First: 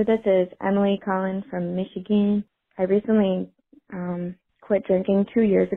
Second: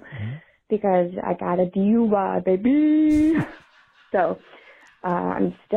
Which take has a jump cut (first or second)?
first